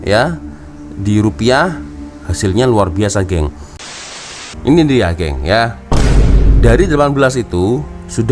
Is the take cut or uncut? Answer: cut